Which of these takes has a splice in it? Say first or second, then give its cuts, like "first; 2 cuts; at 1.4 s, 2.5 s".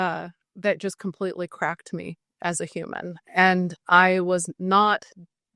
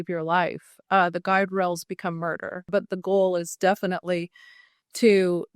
second; 1 cut; at 2.6 s